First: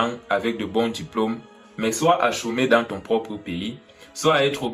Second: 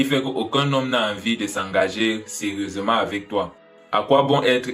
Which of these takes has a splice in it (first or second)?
second